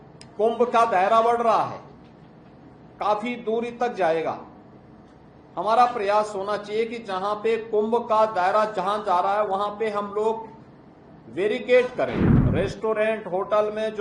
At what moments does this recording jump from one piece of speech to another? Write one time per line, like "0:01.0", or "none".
0:12.4